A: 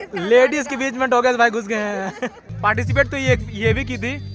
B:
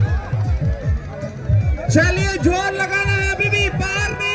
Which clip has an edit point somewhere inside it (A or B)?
A